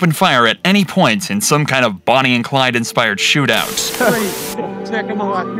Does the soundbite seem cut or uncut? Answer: cut